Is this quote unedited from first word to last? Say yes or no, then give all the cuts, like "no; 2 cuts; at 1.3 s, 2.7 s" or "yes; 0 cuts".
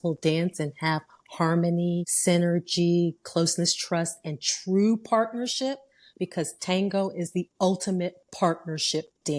no; 1 cut; at 2.1 s